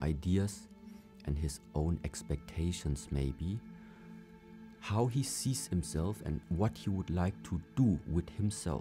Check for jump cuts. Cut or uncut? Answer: uncut